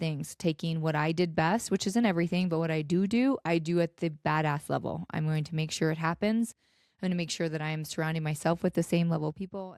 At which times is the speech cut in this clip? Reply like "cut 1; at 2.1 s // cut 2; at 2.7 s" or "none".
none